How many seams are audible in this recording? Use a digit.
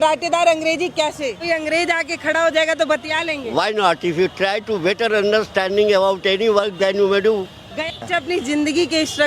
2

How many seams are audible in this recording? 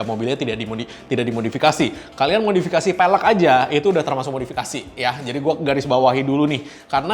0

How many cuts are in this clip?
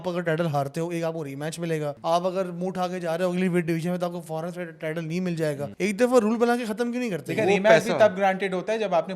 2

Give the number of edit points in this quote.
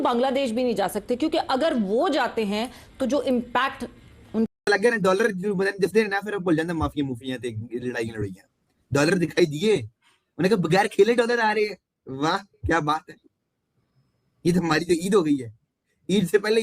1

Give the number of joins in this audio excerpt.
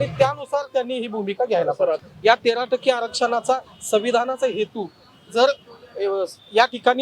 1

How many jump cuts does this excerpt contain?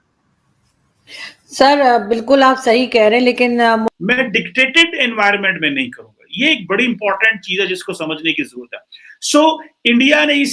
1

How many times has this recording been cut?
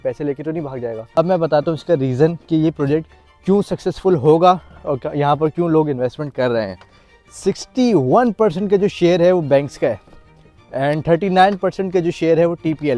2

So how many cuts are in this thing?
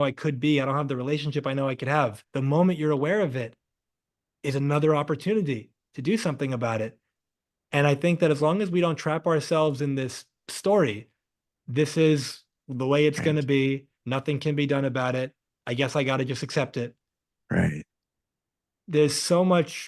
1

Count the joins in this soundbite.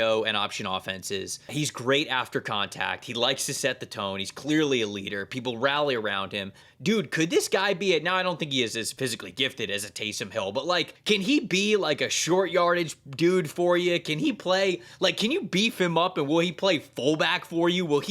3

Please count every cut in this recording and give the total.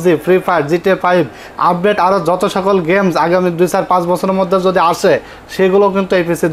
0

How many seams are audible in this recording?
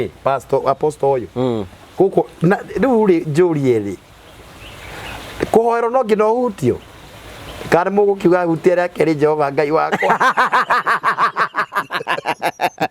0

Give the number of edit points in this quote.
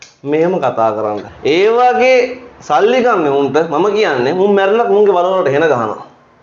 1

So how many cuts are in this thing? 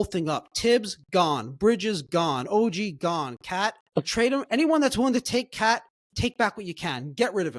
2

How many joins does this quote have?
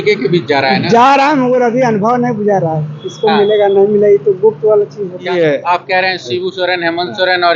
1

